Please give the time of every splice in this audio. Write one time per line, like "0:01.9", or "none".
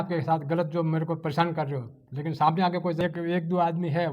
0:03.0